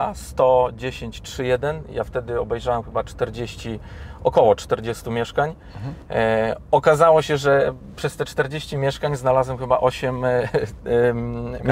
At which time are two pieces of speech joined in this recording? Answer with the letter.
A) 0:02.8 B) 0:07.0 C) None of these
C